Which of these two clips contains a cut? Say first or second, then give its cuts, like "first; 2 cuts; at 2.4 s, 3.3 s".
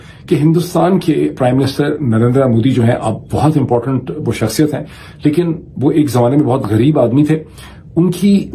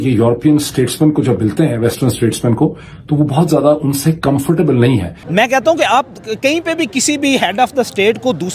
second; 1 cut; at 5.2 s